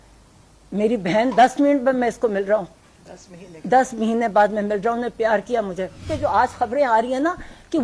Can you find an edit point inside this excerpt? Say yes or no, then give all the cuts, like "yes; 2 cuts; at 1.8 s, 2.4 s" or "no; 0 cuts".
yes; 1 cut; at 6.0 s